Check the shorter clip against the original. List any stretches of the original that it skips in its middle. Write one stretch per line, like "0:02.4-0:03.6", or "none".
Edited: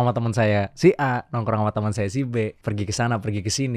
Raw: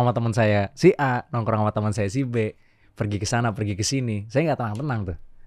0:02.6-0:02.9